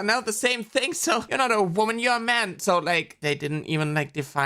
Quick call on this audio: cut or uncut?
cut